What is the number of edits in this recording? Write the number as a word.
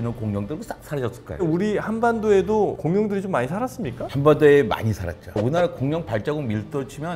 two